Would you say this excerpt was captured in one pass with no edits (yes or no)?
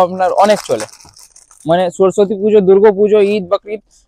yes